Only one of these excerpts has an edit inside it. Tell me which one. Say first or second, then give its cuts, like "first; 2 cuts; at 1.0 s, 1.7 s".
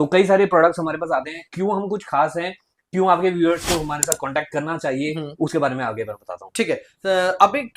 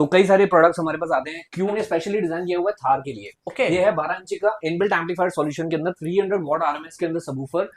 second; 1 cut; at 1.7 s